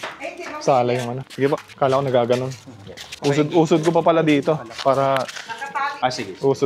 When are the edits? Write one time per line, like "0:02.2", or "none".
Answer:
none